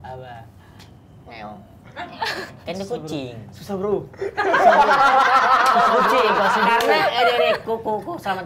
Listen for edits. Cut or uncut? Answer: uncut